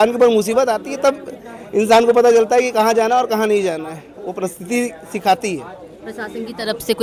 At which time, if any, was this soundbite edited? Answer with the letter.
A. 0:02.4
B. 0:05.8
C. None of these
C